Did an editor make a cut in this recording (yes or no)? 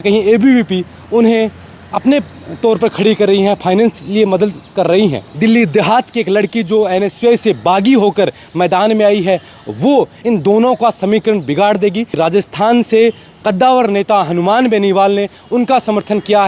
yes